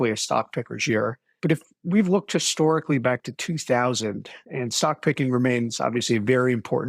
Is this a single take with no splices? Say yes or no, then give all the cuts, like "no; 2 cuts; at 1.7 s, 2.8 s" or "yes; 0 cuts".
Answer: no; 1 cut; at 1.3 s